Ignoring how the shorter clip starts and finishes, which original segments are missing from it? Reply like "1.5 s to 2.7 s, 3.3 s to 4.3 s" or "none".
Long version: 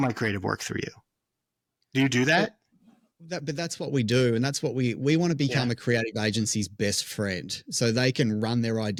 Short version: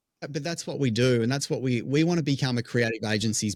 none